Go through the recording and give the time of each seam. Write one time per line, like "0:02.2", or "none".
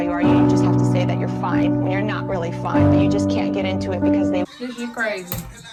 none